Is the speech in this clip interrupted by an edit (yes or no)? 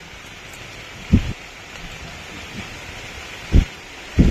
no